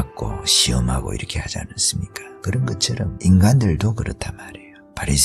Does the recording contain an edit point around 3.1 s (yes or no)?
yes